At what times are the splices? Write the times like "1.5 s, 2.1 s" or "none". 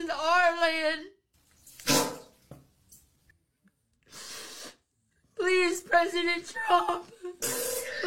none